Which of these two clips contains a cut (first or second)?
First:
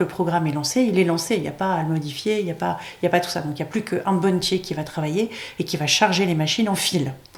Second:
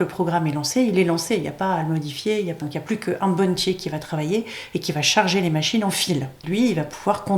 second